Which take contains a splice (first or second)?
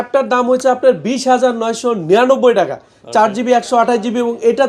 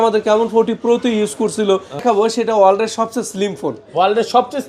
second